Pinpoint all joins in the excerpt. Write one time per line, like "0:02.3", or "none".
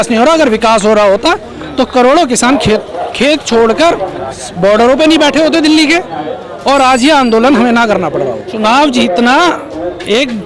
0:08.5